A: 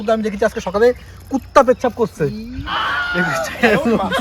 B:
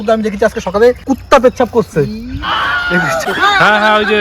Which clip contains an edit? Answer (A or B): B